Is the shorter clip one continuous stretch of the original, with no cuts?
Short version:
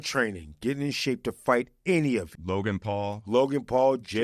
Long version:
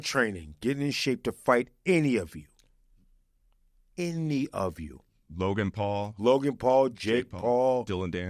no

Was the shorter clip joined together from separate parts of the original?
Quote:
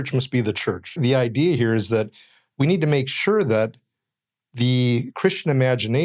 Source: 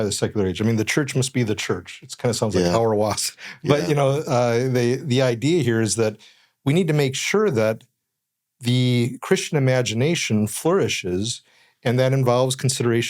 yes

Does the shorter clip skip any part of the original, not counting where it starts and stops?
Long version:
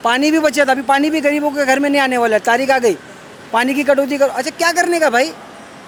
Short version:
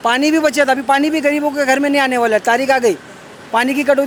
no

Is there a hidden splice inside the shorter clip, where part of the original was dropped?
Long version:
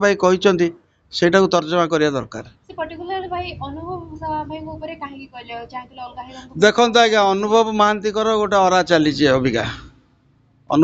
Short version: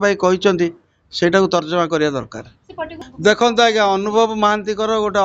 yes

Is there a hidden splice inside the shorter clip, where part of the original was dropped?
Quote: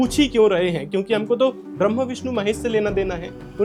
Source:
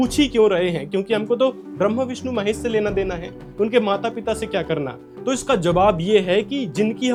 no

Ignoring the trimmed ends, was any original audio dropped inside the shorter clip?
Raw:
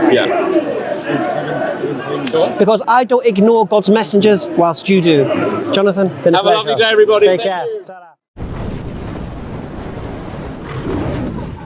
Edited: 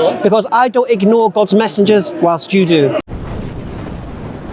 yes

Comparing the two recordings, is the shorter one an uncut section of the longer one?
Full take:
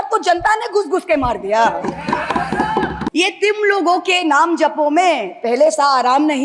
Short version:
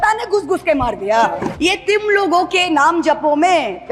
no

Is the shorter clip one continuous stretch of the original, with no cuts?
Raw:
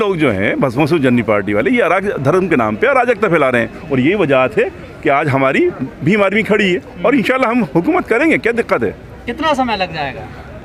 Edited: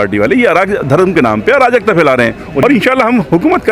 no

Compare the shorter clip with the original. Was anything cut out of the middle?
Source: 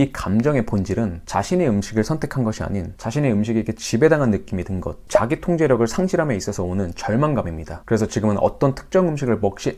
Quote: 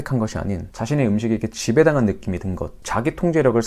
no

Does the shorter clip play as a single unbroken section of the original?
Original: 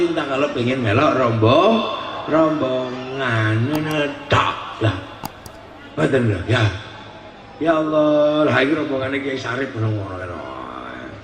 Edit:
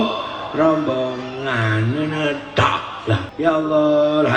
no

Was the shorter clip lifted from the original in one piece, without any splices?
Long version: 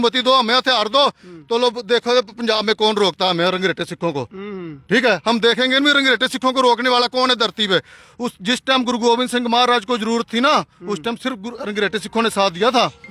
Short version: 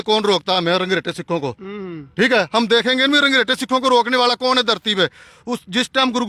yes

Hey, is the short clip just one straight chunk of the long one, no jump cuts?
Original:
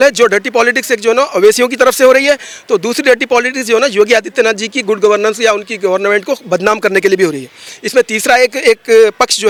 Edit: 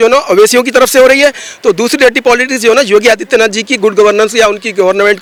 yes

